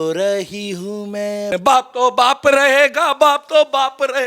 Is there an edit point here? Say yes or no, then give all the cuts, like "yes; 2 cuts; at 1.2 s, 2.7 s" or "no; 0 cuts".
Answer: yes; 1 cut; at 1.5 s